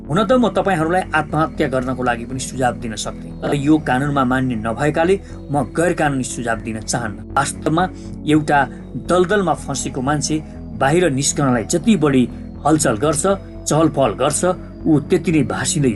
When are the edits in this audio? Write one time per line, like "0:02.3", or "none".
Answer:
none

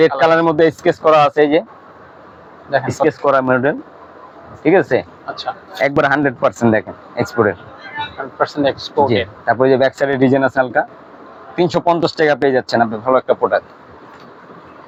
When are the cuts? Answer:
none

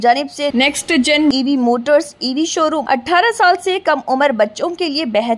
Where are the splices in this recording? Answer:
0:02.8

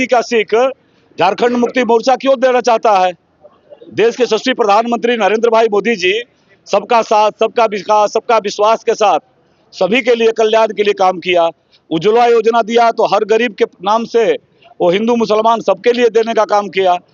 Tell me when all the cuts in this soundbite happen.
none

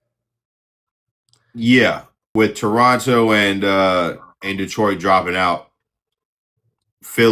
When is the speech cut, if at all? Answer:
0:02.2

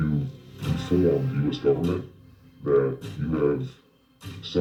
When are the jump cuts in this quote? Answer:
none

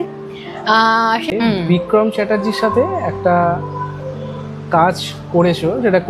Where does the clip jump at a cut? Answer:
0:01.3

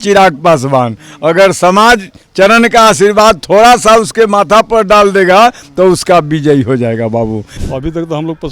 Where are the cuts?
0:07.5

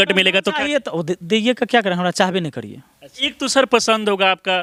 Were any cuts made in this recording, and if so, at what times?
none

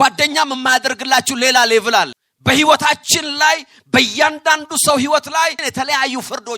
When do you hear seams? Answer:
0:02.2
0:05.6

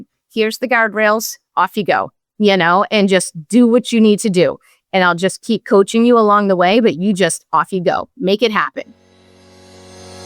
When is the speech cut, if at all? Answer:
0:09.2

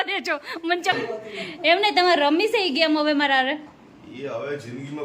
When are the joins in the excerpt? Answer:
0:01.0

